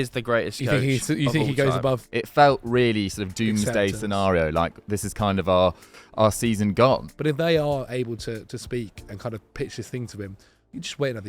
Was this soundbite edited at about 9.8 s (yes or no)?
no